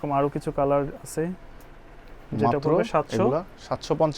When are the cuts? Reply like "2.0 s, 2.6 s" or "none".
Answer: none